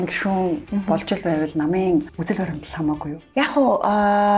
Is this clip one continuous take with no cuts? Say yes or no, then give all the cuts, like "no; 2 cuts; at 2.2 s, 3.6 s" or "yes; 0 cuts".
no; 2 cuts; at 2.1 s, 3.2 s